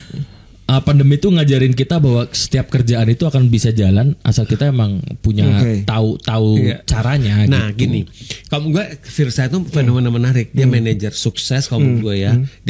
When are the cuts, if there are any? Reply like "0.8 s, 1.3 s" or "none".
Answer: none